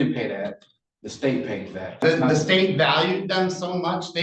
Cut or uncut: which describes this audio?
cut